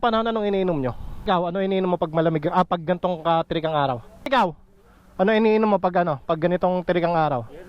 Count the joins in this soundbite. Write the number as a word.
two